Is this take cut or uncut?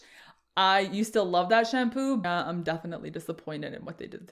cut